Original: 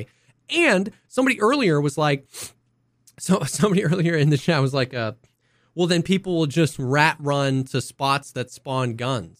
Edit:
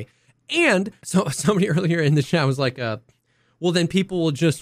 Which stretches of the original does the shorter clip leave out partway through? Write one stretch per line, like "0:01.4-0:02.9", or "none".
0:01.0-0:03.1

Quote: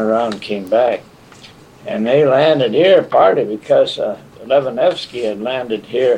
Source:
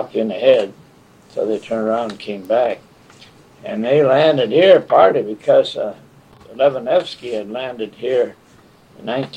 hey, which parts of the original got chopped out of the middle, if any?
0:06.1-0:06.4

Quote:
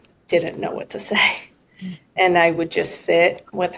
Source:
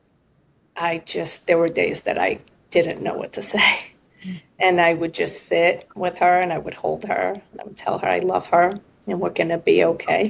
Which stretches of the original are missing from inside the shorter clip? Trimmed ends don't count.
none

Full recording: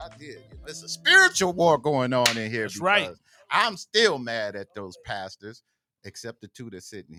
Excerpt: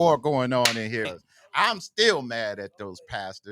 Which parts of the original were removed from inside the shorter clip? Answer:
0:02.7-0:03.1

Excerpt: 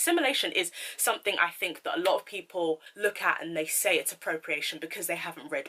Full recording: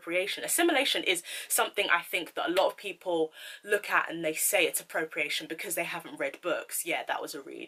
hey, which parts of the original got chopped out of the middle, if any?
0:03.4-0:03.6

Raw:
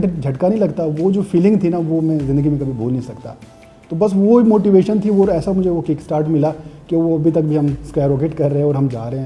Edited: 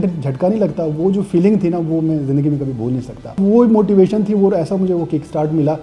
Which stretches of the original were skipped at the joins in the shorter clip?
0:03.4-0:04.1

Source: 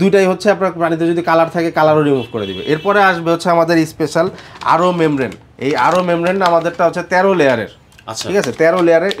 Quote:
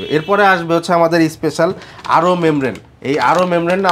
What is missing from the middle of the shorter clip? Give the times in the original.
none

